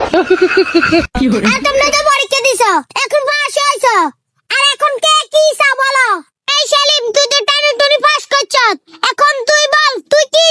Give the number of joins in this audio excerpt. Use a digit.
0